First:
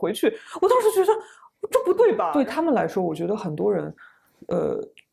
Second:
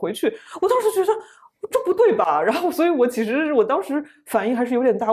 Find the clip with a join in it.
first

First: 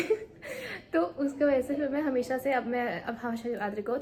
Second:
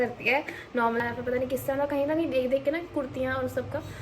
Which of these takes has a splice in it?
second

